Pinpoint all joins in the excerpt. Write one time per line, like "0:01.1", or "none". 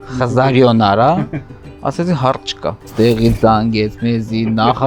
0:02.9